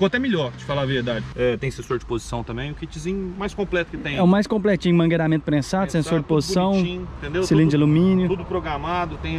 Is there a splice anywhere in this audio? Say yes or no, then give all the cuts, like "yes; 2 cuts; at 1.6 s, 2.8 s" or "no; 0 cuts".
yes; 1 cut; at 1.3 s